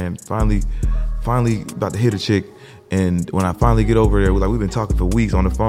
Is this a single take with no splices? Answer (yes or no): yes